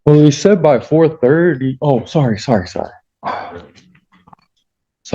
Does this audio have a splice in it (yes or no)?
no